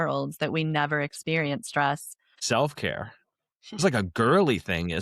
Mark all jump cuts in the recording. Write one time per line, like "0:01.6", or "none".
0:02.4